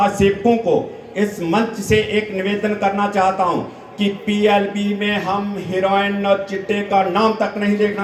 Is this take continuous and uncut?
yes; 0 cuts

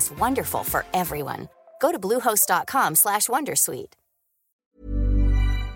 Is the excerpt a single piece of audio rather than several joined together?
no; 1 cut; at 4.6 s

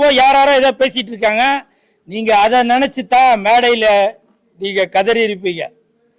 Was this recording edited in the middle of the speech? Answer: no; 0 cuts

